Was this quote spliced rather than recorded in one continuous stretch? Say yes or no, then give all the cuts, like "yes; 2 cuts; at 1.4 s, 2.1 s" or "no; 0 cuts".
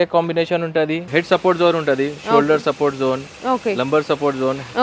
yes; 1 cut; at 1.0 s